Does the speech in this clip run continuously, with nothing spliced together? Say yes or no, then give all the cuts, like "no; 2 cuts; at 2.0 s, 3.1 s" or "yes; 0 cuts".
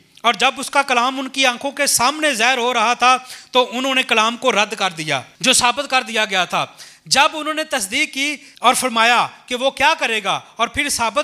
no; 2 cuts; at 5.3 s, 8.4 s